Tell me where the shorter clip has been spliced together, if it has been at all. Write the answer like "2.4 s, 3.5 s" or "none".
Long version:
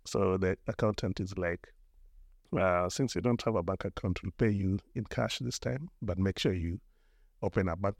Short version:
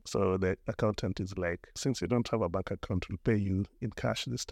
1.8 s